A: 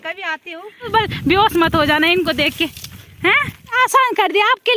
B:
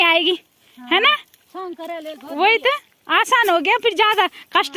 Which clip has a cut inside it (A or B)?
A